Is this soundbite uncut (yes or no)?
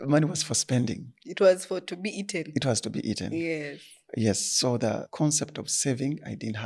no